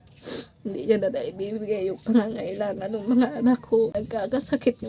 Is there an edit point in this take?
yes; 1 cut; at 4.0 s

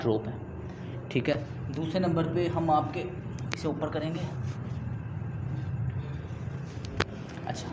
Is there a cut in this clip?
no; 0 cuts

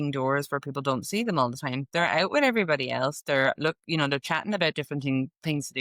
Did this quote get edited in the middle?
no; 0 cuts

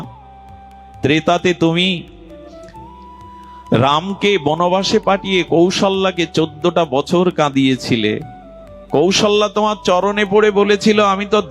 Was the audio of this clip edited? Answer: yes; 2 cuts; at 2.2 s, 3.7 s

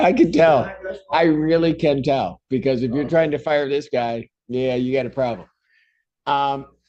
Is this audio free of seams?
yes; 0 cuts

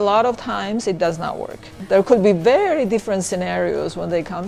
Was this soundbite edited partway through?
yes; 1 cut; at 1.8 s

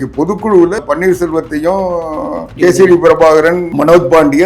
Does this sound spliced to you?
yes; 3 cuts; at 0.8 s, 2.5 s, 3.7 s

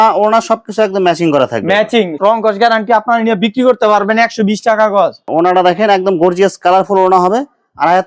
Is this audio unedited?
no; 2 cuts; at 2.1 s, 5.2 s

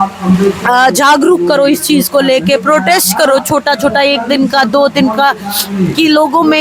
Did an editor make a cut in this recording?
no; 0 cuts

